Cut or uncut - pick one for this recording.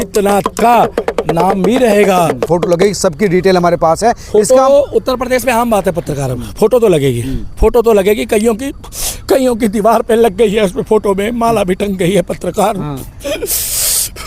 cut